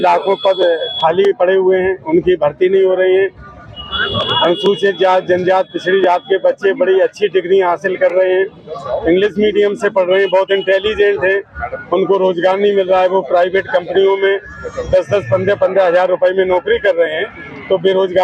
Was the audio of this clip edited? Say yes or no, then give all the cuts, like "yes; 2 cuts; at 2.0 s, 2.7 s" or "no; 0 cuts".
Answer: no; 0 cuts